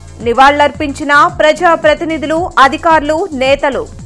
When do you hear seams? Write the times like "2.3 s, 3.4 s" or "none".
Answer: none